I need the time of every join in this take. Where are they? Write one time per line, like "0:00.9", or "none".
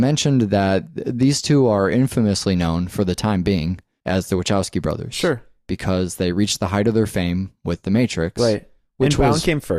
0:06.8